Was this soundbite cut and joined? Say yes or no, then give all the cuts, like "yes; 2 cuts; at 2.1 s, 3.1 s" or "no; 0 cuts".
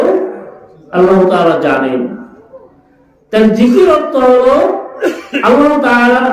no; 0 cuts